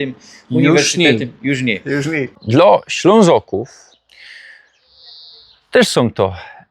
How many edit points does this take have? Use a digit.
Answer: 1